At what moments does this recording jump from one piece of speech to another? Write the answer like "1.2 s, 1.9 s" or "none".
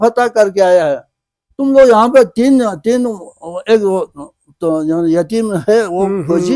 none